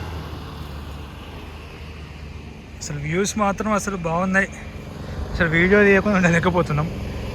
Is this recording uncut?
yes; 0 cuts

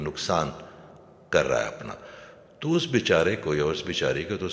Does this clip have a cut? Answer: no; 0 cuts

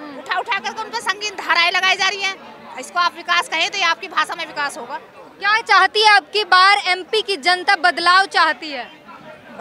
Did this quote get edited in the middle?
no; 0 cuts

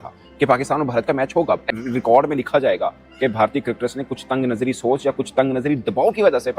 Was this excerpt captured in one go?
no; 1 cut; at 1.7 s

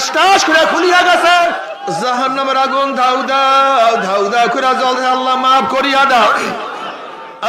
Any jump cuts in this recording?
yes; 1 cut; at 1.6 s

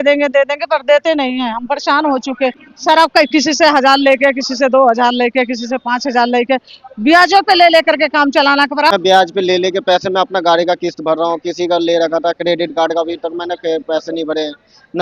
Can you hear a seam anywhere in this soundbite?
yes; 2 cuts; at 2.7 s, 8.9 s

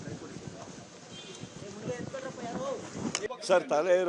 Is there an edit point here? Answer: no; 0 cuts

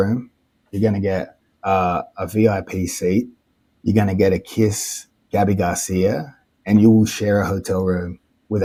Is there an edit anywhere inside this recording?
no; 0 cuts

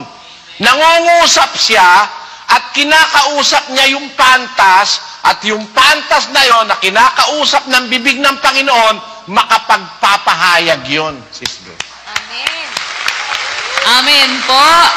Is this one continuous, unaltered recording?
yes; 0 cuts

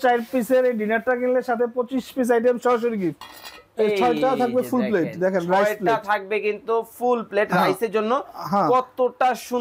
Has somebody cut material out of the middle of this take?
yes; 1 cut; at 3.1 s

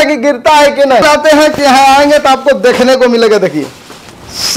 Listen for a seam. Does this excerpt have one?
yes; 1 cut; at 1.0 s

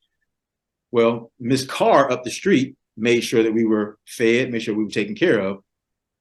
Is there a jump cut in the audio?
no; 0 cuts

